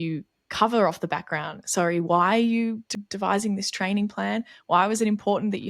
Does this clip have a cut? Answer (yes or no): yes